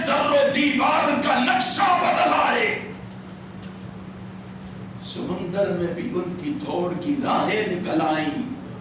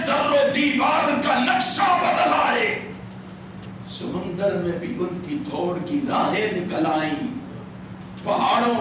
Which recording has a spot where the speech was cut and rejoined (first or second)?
second